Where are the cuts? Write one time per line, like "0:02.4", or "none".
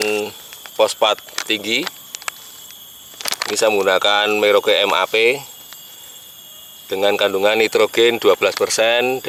none

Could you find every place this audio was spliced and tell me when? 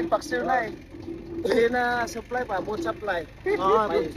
none

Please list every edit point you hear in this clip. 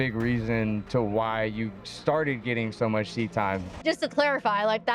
0:03.7

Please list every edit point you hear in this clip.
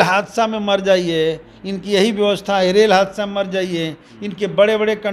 none

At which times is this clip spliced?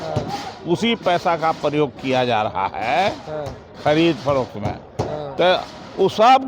none

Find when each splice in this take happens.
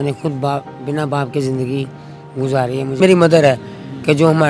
0:03.0

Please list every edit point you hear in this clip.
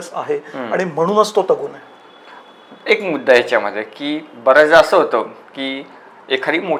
none

